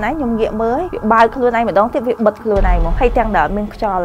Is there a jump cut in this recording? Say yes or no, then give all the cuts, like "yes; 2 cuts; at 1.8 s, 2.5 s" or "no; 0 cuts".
no; 0 cuts